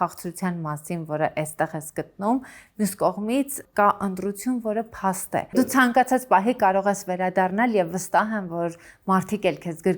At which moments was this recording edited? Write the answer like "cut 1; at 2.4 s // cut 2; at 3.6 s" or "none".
cut 1; at 5.7 s